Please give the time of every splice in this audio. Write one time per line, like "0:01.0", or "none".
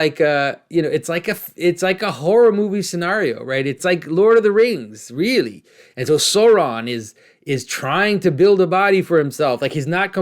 0:03.8